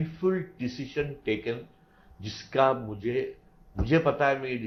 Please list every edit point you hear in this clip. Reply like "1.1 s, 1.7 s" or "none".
none